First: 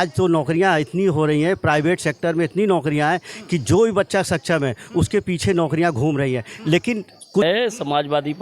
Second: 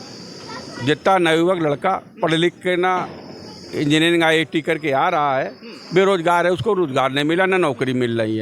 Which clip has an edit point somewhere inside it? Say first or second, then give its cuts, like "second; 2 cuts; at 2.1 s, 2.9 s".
first; 1 cut; at 7.4 s